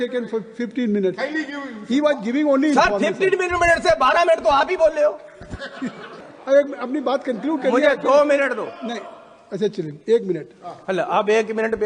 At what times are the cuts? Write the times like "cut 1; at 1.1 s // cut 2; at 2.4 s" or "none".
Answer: cut 1; at 6.3 s

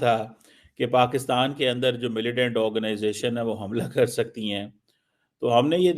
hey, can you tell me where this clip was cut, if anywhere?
none

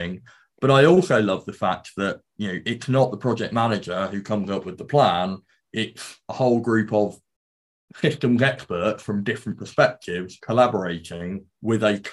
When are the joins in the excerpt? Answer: none

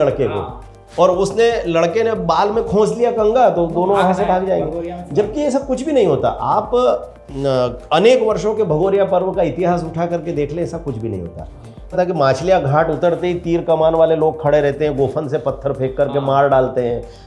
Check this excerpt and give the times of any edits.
cut 1; at 11.9 s

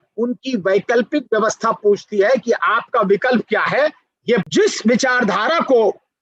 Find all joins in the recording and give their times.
cut 1; at 4.4 s

